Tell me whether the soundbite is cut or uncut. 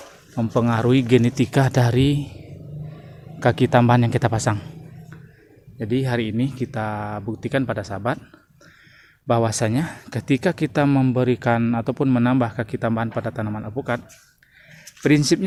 uncut